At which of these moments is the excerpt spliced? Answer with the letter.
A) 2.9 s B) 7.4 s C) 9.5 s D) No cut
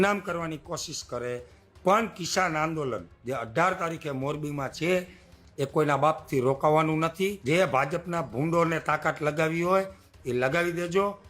B